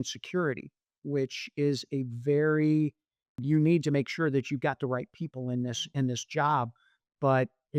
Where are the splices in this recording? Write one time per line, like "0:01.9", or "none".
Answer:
none